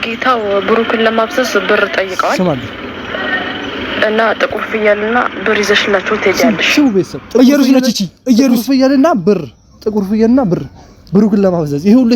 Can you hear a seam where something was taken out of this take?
no; 0 cuts

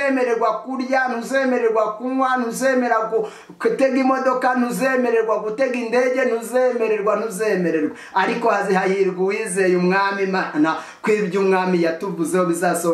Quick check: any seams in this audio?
no; 0 cuts

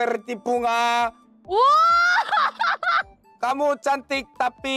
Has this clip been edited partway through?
no; 0 cuts

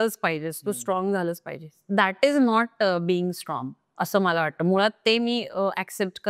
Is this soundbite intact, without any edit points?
yes; 0 cuts

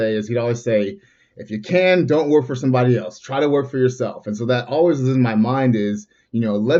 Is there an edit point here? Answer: no; 0 cuts

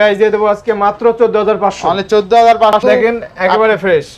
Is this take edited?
yes; 1 cut; at 2.8 s

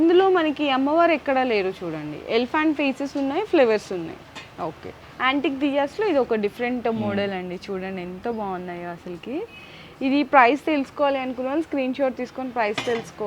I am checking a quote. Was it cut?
no; 0 cuts

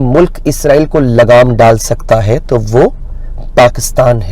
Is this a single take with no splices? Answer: yes; 0 cuts

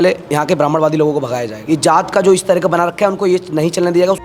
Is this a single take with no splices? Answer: no; 1 cut; at 1.5 s

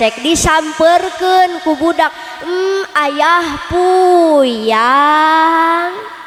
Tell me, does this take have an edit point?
no; 0 cuts

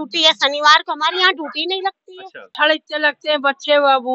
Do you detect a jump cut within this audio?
yes; 1 cut; at 2.5 s

